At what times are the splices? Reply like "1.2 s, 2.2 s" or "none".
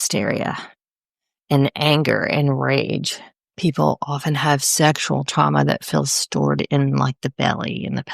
3.5 s